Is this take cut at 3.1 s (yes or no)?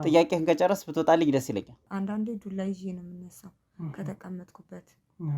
no